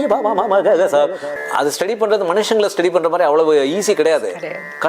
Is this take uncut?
no; 1 cut; at 1.3 s

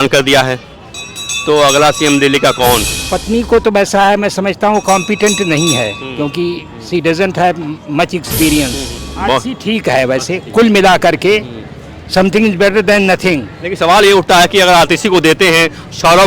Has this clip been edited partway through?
yes; 2 cuts; at 3.0 s, 9.0 s

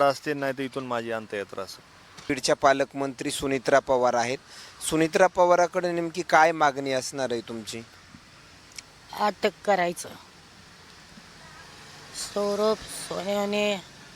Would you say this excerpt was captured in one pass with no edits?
no; 1 cut; at 2.3 s

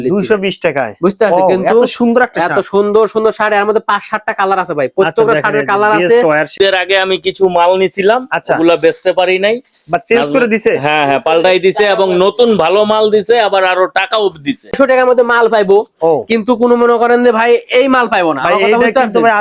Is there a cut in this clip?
yes; 2 cuts; at 6.5 s, 14.8 s

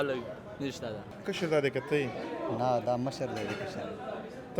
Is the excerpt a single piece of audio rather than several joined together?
no; 1 cut; at 1.1 s

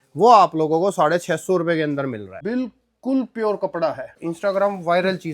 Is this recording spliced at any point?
yes; 2 cuts; at 2.3 s, 4.1 s

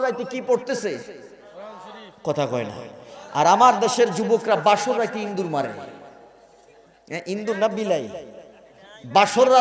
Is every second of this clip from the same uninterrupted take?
yes; 0 cuts

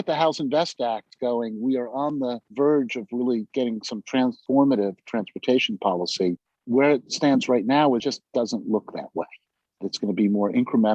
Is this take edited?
yes; 2 cuts; at 6.5 s, 9.8 s

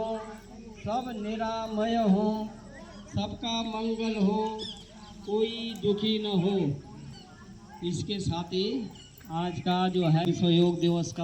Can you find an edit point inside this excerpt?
yes; 1 cut; at 10.3 s

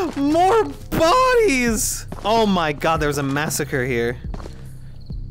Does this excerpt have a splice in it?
no; 0 cuts

